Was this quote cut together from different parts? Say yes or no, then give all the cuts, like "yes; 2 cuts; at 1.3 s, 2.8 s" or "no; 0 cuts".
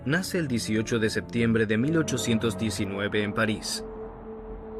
yes; 1 cut; at 3.2 s